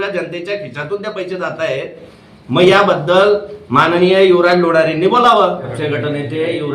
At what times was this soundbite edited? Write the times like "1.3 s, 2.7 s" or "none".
5.7 s